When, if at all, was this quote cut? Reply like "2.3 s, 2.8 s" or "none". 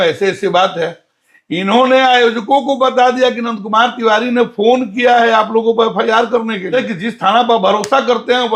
6.8 s